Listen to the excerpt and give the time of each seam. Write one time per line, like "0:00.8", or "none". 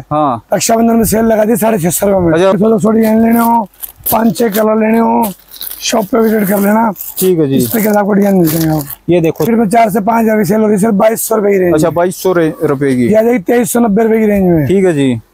0:02.5
0:09.5

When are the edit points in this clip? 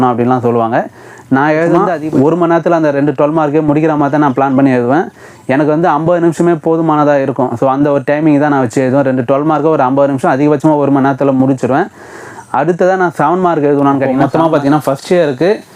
0:01.9
0:14.2

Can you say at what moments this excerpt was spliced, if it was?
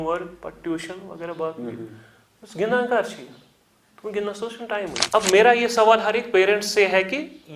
0:05.0

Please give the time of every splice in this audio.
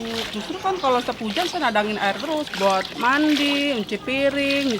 0:02.5

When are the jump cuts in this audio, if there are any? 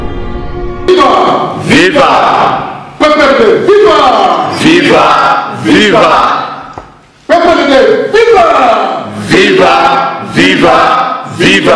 0:01.1

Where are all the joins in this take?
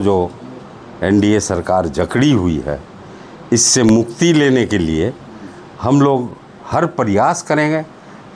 none

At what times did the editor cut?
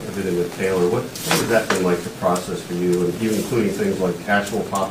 none

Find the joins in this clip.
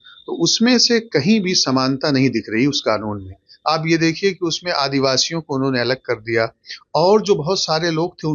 none

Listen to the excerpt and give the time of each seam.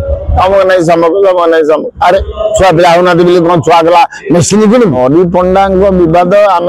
0:05.0

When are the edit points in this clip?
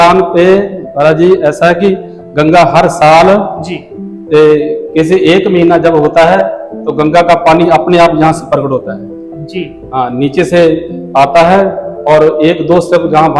none

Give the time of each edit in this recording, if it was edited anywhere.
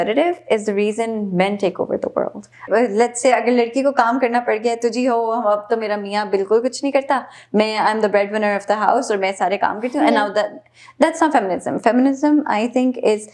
0:02.6

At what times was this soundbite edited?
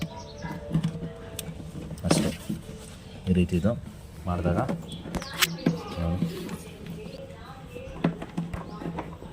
0:07.2

